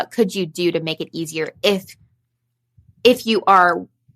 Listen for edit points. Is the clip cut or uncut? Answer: uncut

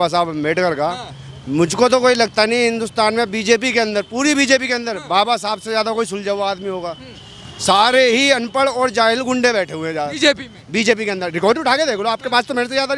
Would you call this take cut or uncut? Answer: uncut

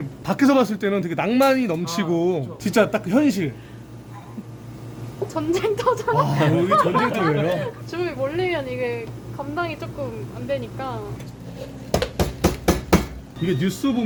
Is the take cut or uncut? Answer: uncut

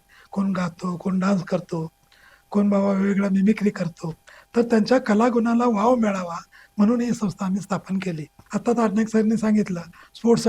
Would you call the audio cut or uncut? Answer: cut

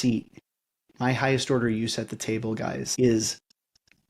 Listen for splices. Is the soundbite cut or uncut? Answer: cut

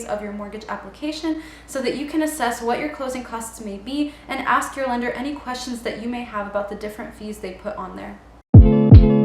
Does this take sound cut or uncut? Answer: cut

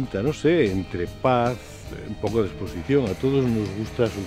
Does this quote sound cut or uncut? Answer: uncut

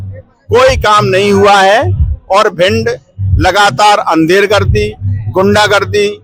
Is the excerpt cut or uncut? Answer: uncut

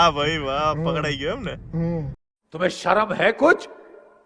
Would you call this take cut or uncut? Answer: uncut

